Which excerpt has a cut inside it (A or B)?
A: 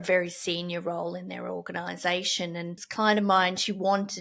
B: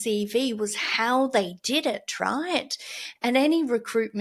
A